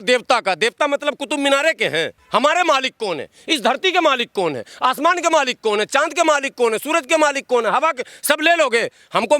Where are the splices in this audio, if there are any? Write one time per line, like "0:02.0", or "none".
0:02.2